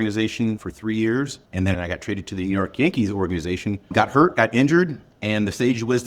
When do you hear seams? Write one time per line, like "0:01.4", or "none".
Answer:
0:01.4
0:03.9